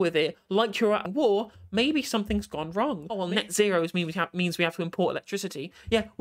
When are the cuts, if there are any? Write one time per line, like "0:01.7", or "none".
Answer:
0:01.1
0:03.2